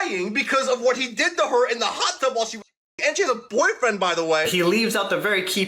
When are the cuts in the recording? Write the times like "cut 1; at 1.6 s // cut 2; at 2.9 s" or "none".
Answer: cut 1; at 4.5 s